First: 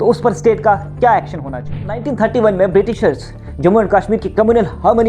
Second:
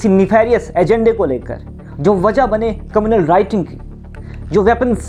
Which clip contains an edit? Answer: first; 1 cut; at 2.0 s

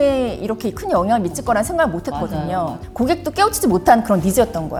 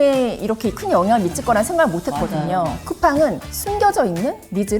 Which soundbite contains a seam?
second; 1 cut; at 2.8 s

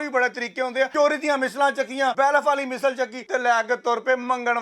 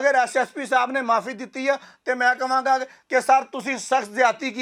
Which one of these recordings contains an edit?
first; 3 cuts; at 0.9 s, 2.1 s, 3.2 s

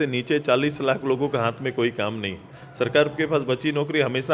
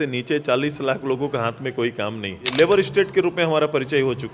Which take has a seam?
second; 1 cut; at 2.5 s

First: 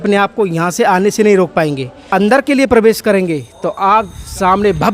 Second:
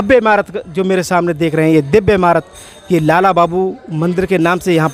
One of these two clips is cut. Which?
first; 1 cut; at 1.9 s

